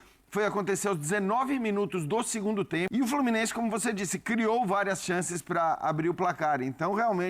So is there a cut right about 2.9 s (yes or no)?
yes